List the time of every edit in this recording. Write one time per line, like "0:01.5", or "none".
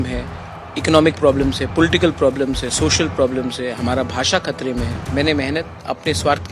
0:05.0